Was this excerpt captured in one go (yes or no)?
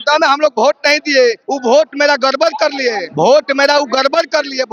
no